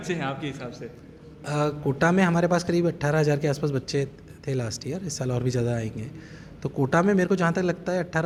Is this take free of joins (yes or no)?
yes